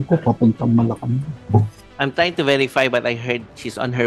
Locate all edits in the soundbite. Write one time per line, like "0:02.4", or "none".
0:01.8